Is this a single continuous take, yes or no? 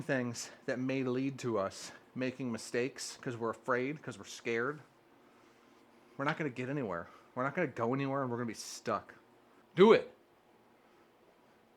yes